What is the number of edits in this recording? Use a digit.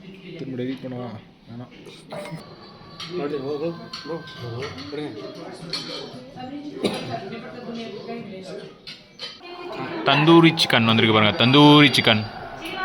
0